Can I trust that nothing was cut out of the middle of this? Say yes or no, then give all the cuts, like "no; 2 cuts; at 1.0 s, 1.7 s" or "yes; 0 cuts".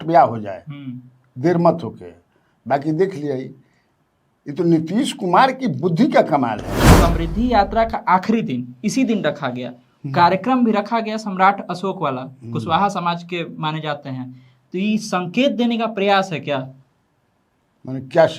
no; 1 cut; at 6.9 s